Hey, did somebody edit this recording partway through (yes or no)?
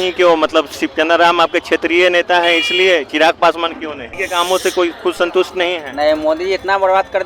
yes